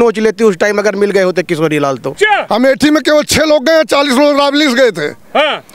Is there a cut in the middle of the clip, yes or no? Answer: yes